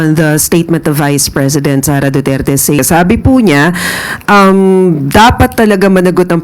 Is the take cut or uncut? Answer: cut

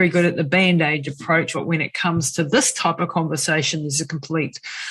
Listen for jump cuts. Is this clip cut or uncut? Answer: cut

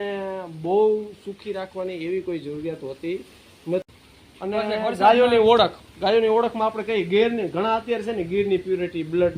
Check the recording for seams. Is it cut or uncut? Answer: cut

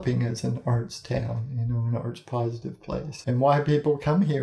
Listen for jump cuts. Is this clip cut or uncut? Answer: uncut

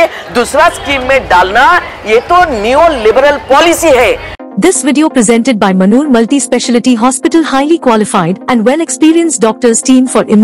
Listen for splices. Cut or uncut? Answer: cut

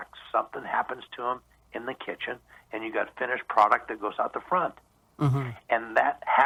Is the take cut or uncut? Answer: uncut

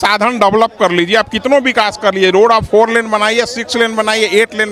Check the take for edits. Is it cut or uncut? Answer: uncut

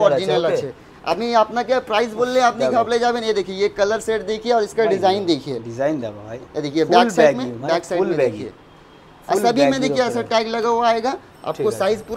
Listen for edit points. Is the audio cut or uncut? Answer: uncut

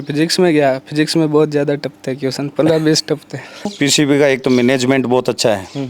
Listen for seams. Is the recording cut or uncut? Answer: cut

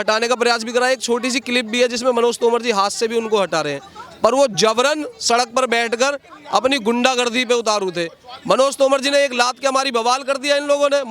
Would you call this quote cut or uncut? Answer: uncut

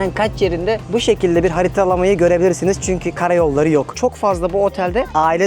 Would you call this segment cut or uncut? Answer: cut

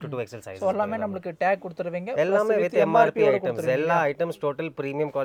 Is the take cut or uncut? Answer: uncut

